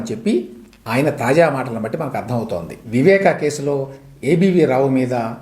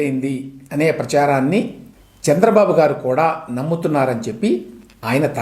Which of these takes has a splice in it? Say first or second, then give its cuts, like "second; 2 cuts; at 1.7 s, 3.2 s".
first; 1 cut; at 2.8 s